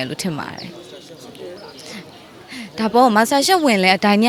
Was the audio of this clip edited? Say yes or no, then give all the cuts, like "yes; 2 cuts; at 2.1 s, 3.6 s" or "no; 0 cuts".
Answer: no; 0 cuts